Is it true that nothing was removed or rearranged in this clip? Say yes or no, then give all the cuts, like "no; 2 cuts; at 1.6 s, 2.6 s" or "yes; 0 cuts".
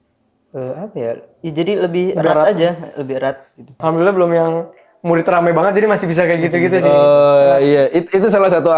no; 1 cut; at 3.7 s